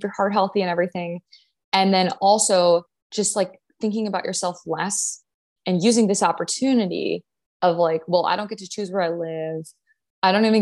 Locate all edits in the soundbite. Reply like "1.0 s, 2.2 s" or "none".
none